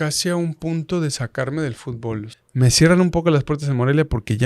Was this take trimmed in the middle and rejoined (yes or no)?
yes